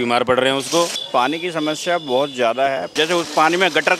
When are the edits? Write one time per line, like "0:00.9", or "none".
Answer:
0:01.0
0:02.9